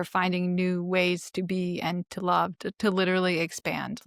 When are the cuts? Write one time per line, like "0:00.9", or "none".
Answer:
none